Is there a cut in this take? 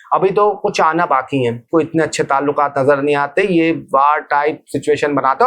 yes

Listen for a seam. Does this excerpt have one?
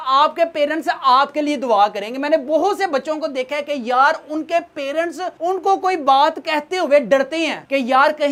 no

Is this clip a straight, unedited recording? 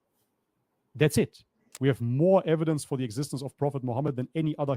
no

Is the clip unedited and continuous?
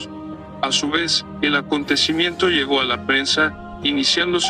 yes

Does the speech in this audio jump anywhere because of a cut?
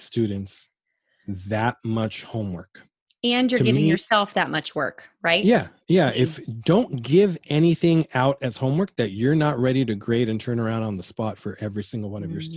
no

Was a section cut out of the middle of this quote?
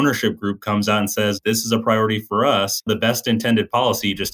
yes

